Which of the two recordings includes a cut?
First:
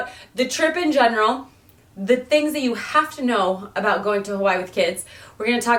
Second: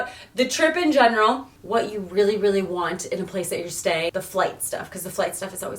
second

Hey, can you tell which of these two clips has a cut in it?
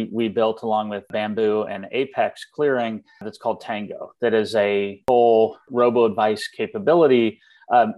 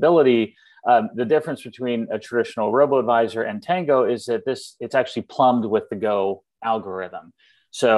first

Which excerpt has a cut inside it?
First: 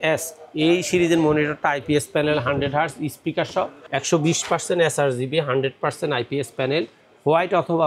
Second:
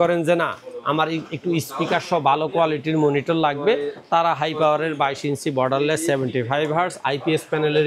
first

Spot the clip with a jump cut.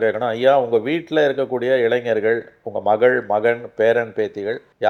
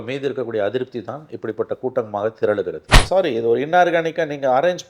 second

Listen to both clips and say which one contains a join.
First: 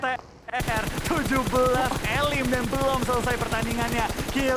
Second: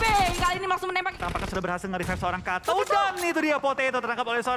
second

